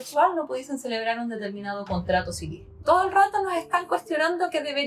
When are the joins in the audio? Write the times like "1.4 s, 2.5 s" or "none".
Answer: 2.6 s